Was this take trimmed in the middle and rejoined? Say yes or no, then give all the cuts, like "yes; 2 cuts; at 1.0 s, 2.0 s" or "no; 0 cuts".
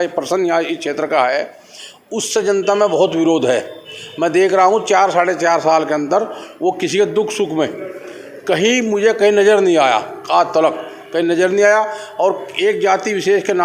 no; 0 cuts